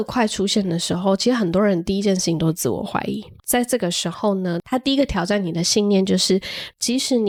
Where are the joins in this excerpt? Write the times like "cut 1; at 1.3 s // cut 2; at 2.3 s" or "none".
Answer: none

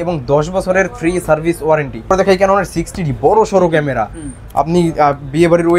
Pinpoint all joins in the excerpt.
cut 1; at 2.1 s

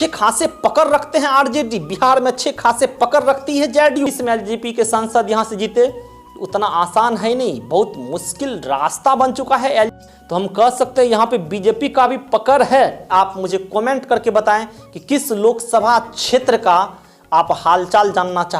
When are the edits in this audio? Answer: cut 1; at 4.1 s // cut 2; at 10.1 s // cut 3; at 13.0 s

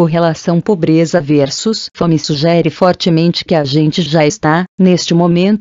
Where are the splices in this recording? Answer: none

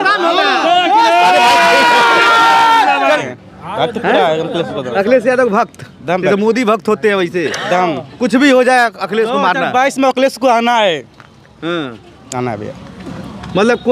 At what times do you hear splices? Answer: cut 1; at 3.2 s

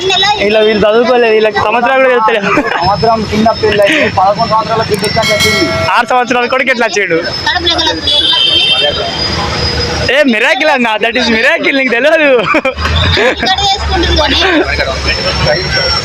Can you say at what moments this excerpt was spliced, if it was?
none

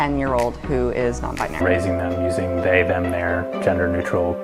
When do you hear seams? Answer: none

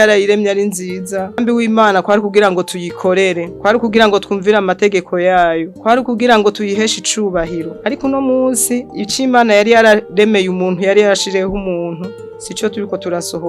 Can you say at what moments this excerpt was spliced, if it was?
cut 1; at 1.4 s

